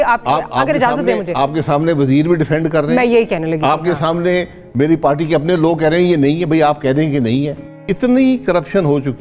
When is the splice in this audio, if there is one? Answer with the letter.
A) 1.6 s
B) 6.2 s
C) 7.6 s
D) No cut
C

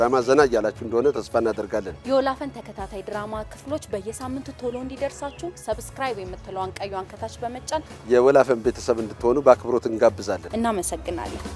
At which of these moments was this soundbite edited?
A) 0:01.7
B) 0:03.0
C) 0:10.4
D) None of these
C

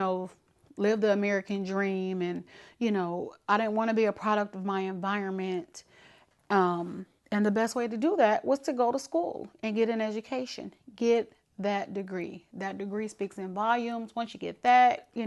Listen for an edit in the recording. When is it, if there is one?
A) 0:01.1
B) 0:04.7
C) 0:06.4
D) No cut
A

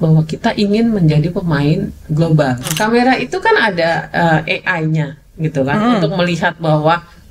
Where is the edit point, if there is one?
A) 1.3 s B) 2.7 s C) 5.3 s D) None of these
B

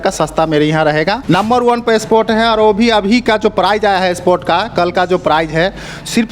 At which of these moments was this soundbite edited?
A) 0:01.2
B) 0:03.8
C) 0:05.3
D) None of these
A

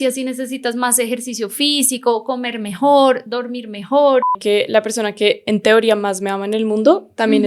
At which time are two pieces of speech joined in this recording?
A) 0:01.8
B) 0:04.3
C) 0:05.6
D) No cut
B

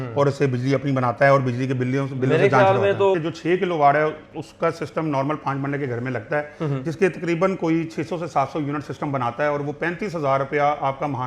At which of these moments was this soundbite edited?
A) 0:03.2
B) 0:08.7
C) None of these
A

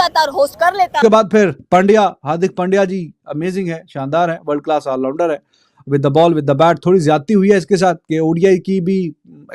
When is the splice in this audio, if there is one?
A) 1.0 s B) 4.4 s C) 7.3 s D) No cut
A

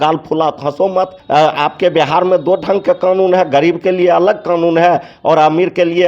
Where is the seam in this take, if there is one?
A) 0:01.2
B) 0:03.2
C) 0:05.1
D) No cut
A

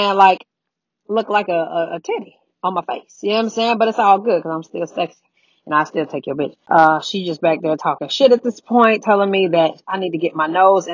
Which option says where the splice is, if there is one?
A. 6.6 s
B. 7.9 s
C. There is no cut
A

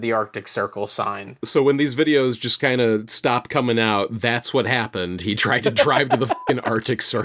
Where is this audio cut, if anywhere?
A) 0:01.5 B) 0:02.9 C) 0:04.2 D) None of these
A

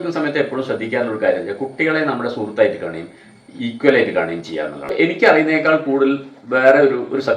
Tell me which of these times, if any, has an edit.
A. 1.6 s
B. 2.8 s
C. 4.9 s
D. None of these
C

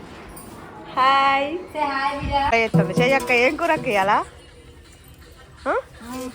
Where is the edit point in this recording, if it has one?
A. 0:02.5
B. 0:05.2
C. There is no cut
A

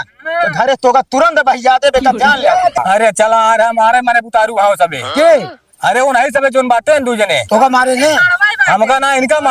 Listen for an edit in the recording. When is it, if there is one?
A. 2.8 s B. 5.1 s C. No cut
A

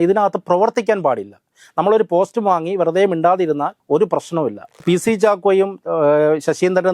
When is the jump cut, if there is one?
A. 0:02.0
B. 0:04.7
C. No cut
B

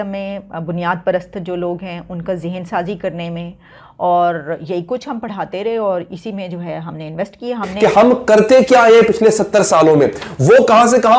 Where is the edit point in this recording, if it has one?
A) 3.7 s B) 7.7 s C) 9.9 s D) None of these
B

